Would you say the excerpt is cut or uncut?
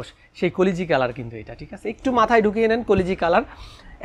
uncut